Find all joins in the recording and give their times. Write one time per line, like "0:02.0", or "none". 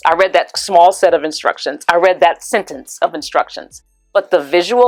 none